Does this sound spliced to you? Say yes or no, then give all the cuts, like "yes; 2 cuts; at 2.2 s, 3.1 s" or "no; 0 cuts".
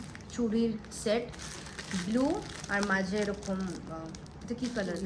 no; 0 cuts